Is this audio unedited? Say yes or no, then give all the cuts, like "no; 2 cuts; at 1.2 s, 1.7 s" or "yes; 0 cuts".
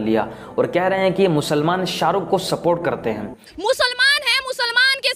yes; 0 cuts